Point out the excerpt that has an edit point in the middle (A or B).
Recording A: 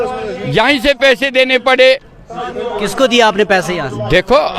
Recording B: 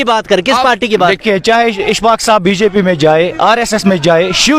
B